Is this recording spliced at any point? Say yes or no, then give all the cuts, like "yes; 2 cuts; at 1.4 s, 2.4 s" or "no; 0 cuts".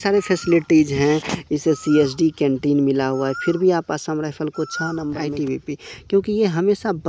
yes; 1 cut; at 5.2 s